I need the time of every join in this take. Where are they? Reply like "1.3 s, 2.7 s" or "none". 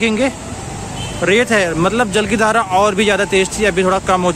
none